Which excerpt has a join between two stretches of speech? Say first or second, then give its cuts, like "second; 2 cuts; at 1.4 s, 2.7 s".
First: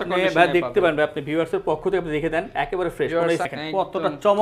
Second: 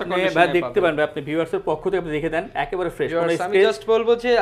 first; 1 cut; at 3.4 s